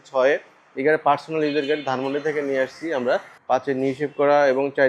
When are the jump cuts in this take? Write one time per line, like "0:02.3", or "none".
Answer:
0:03.3